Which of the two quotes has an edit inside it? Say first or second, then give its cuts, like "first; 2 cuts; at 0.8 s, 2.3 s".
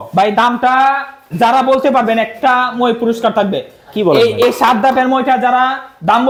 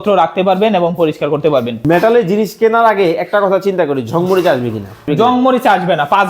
second; 2 cuts; at 1.8 s, 5.1 s